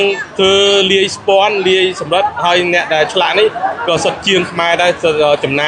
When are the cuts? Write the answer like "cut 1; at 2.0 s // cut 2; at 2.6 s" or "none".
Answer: none